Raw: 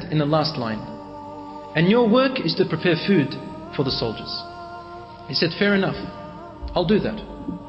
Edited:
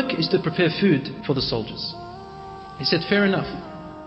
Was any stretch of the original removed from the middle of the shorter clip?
yes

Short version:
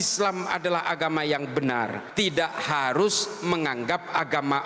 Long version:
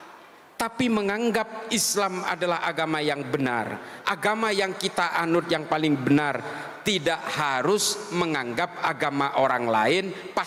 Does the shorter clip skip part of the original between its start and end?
yes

